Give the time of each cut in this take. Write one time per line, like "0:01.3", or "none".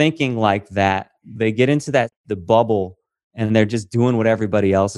0:02.2